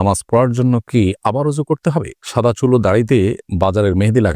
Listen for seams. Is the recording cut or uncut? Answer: cut